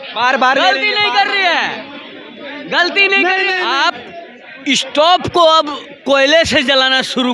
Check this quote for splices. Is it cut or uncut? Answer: cut